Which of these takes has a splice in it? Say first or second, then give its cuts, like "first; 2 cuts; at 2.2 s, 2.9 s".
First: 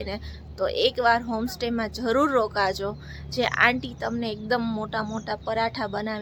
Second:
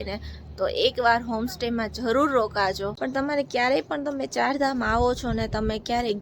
second; 1 cut; at 2.9 s